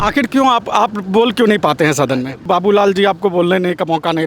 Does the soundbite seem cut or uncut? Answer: cut